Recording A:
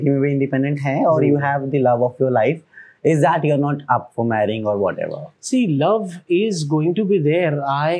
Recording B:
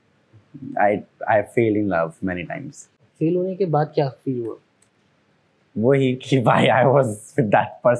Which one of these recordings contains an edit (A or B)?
B